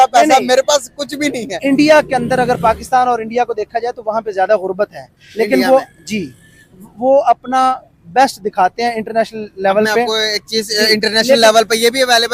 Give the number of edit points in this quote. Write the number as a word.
zero